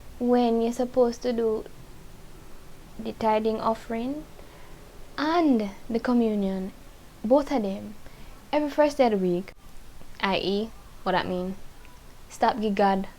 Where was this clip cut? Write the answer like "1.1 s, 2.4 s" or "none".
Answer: 9.5 s